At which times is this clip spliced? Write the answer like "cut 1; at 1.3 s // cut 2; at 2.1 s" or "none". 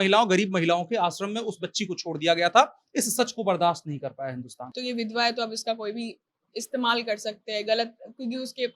cut 1; at 4.8 s